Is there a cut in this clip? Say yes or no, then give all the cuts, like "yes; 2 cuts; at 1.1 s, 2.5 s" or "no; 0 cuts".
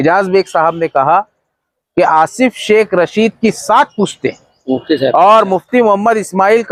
no; 0 cuts